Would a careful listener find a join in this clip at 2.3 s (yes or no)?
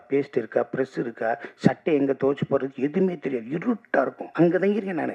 no